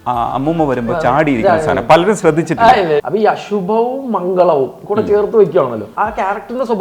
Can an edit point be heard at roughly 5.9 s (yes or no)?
yes